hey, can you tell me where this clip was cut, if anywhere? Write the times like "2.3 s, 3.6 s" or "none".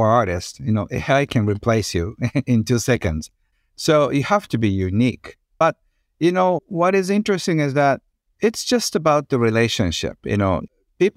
none